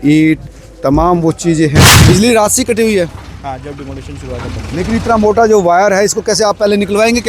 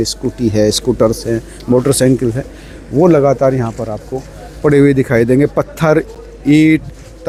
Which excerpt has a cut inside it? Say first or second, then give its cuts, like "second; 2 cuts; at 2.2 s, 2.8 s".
first; 1 cut; at 1.9 s